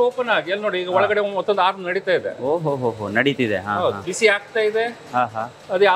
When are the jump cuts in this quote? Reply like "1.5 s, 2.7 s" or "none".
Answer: 4.1 s